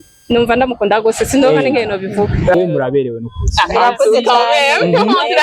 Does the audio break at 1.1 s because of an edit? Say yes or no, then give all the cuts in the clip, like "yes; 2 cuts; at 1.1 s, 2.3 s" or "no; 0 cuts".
no; 1 cut; at 2.5 s